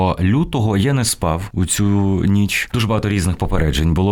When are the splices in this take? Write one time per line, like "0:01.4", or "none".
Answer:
0:01.5
0:02.6